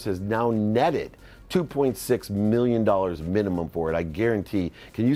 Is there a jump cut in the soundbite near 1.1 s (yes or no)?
no